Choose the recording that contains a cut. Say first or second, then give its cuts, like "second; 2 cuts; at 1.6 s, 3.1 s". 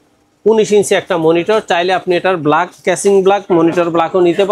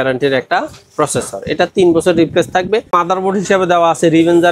second; 1 cut; at 2.9 s